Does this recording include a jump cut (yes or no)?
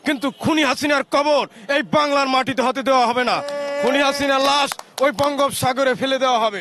no